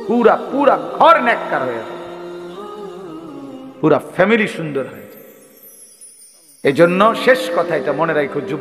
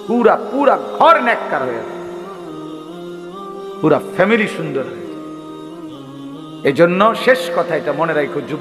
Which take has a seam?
first; 2 cuts; at 2.1 s, 3.8 s

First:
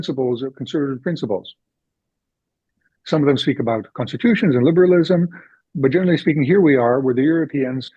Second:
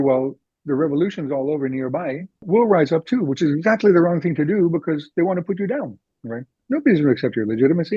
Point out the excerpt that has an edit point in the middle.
second; 1 cut; at 2.4 s

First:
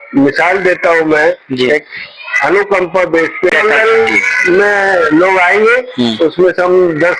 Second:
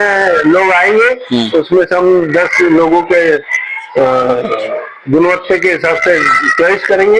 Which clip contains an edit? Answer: first; 1 cut; at 3.5 s

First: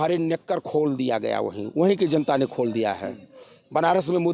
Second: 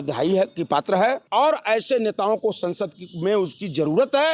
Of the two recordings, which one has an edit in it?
second; 1 cut; at 1.2 s

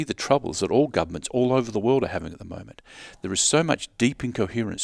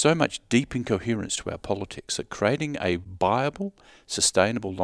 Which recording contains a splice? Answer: second; 1 cut; at 3.1 s

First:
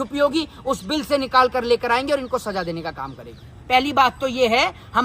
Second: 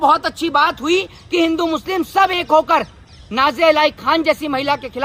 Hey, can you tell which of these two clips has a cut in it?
first; 1 cut; at 3.5 s

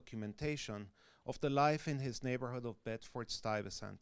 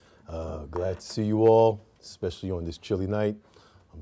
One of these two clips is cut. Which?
second; 1 cut; at 1.9 s

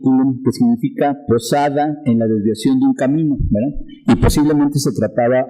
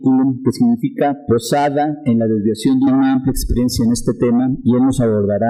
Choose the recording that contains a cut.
first; 1 cut; at 2.9 s

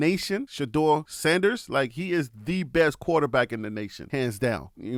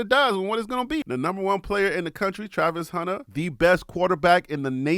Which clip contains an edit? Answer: second; 1 cut; at 1.0 s

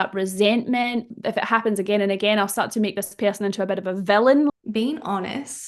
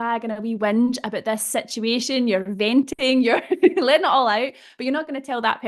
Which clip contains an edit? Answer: first; 2 cuts; at 1.2 s, 4.5 s

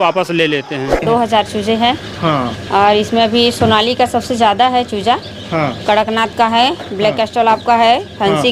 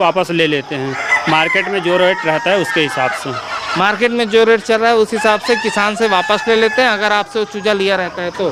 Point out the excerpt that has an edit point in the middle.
first; 1 cut; at 1.0 s

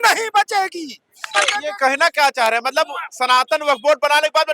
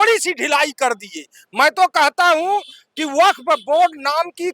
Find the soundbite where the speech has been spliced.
first; 1 cut; at 1.3 s

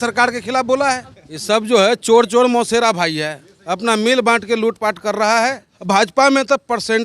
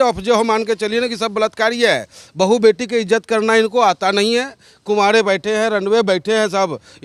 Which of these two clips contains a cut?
first; 2 cuts; at 1.3 s, 5.7 s

